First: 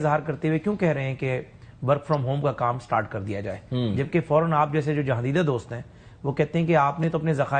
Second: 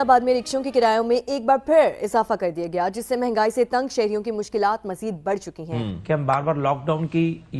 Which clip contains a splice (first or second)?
second